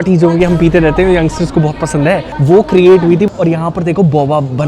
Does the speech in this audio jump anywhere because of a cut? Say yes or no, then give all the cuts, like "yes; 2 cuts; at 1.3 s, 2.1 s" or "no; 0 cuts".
yes; 2 cuts; at 2.3 s, 3.3 s